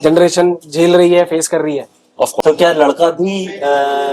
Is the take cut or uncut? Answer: cut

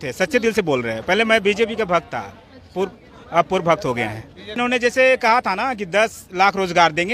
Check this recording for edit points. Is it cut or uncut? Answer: cut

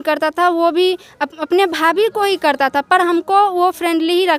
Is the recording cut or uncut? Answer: uncut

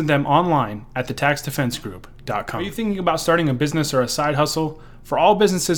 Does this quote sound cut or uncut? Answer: cut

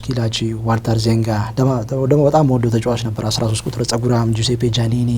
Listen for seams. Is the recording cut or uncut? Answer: uncut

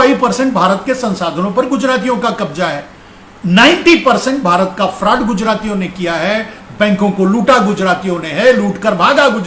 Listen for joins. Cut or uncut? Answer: uncut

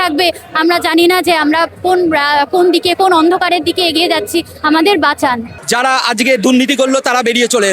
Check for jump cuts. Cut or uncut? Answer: cut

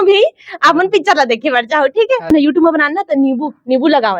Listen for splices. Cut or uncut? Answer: cut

